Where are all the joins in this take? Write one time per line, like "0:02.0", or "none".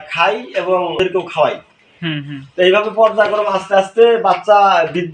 0:01.0